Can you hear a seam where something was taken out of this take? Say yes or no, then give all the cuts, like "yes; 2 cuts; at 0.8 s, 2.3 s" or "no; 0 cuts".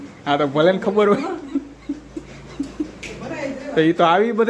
no; 0 cuts